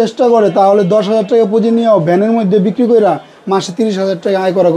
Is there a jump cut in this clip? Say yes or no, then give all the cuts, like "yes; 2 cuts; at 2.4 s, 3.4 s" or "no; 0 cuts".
no; 0 cuts